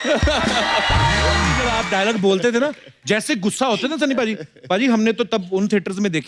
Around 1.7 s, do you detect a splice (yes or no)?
yes